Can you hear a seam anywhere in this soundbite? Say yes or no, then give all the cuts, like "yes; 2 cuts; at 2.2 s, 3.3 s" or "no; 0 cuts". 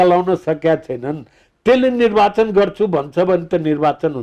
no; 0 cuts